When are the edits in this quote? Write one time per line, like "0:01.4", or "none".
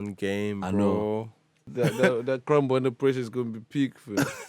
0:01.7